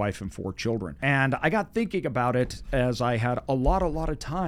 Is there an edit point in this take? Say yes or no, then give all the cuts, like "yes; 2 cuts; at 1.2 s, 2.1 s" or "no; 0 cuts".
yes; 1 cut; at 0.9 s